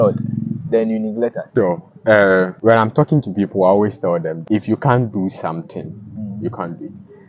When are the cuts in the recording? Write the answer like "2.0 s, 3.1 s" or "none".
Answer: 1.4 s, 2.5 s, 4.4 s